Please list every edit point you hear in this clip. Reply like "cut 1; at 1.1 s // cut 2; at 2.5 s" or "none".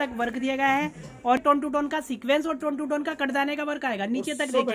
cut 1; at 1.4 s